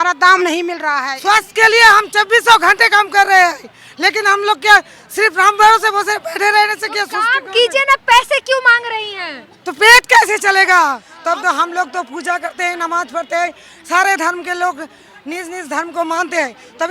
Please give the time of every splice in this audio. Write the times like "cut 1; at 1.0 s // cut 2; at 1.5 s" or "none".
cut 1; at 1.1 s // cut 2; at 11.1 s